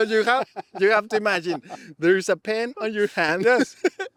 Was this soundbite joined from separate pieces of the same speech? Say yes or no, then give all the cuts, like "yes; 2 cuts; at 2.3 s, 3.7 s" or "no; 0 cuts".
no; 0 cuts